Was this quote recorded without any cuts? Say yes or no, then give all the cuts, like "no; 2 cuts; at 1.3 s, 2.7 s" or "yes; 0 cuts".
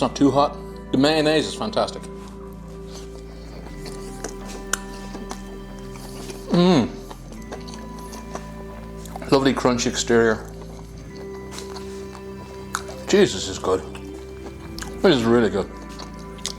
yes; 0 cuts